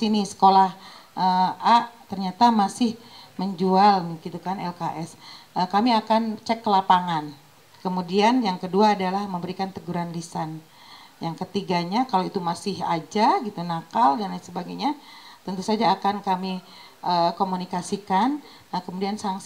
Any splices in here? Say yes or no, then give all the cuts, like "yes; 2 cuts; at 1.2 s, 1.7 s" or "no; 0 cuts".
no; 0 cuts